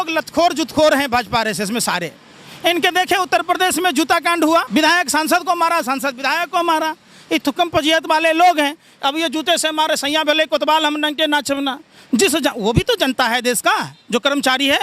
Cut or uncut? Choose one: cut